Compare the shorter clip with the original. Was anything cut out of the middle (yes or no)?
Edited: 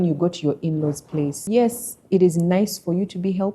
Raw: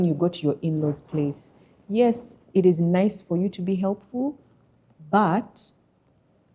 yes